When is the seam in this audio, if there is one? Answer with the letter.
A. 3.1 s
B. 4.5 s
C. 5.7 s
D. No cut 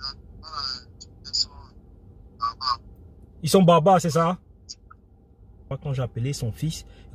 C